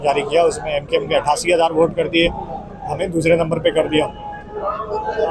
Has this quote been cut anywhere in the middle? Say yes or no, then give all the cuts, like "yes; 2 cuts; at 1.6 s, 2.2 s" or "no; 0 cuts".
no; 0 cuts